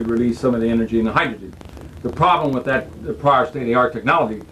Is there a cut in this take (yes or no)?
no